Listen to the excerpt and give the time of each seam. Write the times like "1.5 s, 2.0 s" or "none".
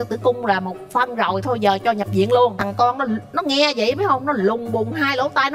2.6 s